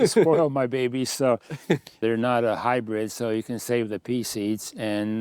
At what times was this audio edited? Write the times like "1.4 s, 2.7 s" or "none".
2.0 s